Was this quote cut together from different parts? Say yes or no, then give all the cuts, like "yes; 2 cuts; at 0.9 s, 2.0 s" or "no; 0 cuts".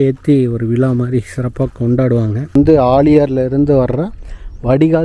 yes; 1 cut; at 2.5 s